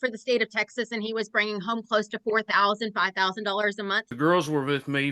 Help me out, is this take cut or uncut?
cut